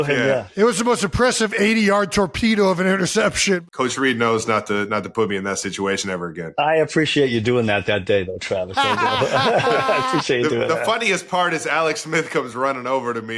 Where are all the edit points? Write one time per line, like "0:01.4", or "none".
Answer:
0:03.6
0:06.4